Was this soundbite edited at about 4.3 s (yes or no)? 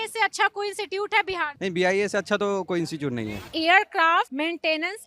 yes